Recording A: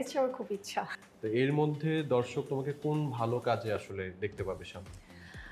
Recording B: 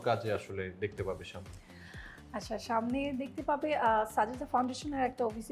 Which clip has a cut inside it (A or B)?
A